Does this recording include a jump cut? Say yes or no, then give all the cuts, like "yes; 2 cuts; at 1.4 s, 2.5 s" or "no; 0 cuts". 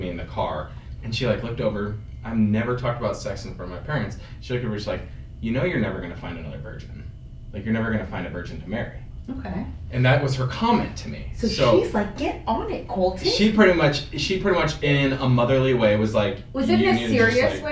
no; 0 cuts